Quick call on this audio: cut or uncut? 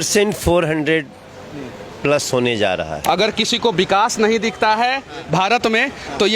cut